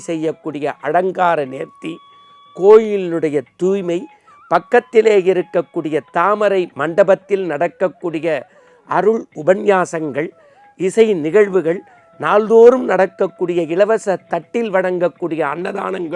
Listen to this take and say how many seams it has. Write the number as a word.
zero